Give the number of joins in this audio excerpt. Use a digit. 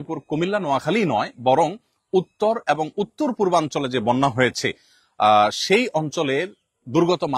0